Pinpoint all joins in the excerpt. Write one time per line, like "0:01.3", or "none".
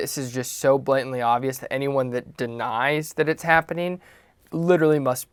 none